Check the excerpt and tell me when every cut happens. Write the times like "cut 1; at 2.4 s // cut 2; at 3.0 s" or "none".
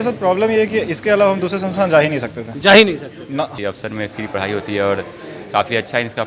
cut 1; at 3.5 s